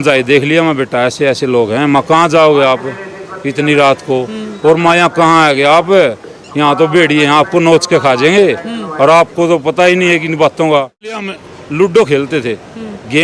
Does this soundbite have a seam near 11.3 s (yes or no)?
yes